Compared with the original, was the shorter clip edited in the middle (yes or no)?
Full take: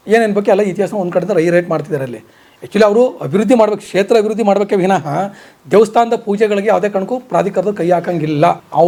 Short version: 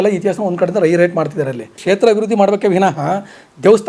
yes